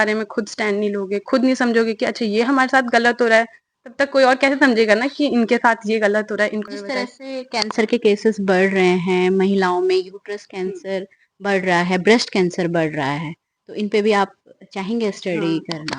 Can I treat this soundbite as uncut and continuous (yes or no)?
no